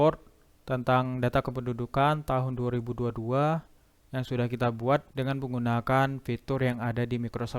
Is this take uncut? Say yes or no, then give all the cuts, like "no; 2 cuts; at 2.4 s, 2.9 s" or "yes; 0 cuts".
yes; 0 cuts